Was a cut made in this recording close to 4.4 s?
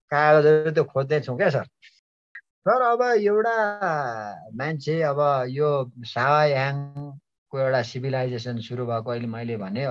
no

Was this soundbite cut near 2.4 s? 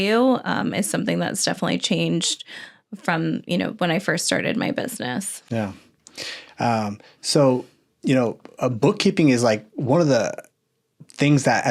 no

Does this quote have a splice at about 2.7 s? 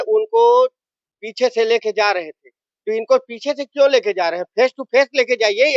no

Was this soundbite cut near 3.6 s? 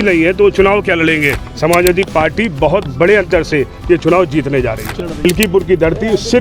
no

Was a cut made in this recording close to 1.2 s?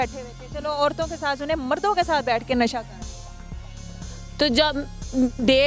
no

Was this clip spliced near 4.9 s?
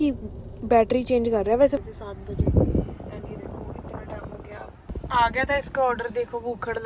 yes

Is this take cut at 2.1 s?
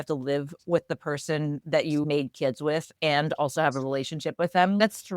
yes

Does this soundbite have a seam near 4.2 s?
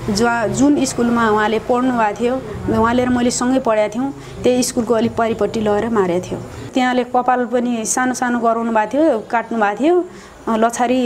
no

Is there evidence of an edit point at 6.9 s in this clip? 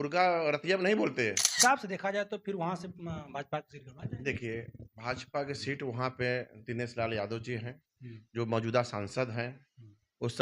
no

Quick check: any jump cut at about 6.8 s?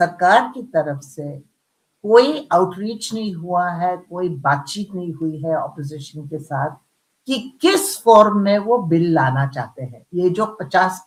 no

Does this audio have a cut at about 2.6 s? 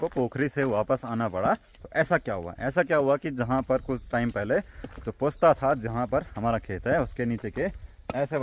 no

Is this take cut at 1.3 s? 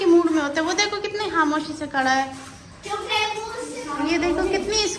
no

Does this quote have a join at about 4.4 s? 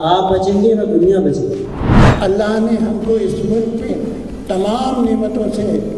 no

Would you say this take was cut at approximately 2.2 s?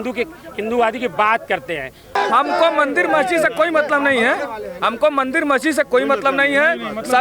yes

